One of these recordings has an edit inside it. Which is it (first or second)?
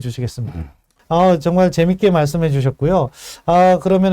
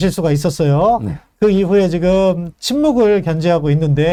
first